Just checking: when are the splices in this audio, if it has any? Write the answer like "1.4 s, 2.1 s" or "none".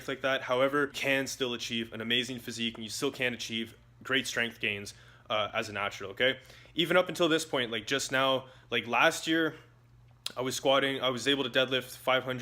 1.0 s